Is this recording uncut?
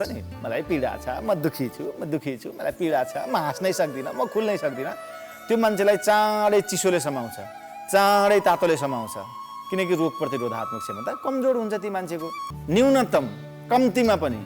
no; 1 cut; at 12.5 s

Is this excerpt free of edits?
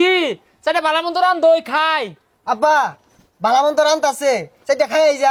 yes; 0 cuts

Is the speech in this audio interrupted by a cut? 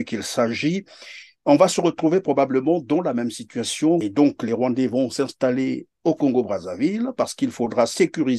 yes; 1 cut; at 4.1 s

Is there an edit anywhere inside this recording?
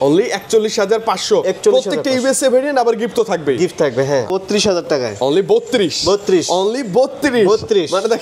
yes; 1 cut; at 4.3 s

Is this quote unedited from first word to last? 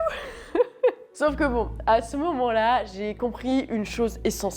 yes; 0 cuts

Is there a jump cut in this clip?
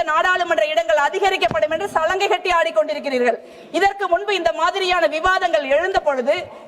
no; 0 cuts

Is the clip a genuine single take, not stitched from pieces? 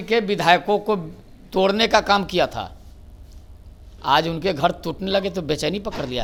yes; 0 cuts

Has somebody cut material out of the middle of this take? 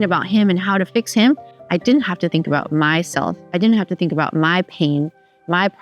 no; 0 cuts

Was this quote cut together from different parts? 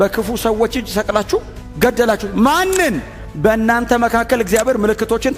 yes; 1 cut; at 2.2 s

